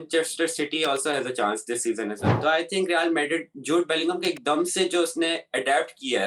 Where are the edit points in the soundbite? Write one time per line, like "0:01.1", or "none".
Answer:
0:02.3